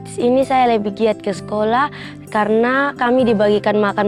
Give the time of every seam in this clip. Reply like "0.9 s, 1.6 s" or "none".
none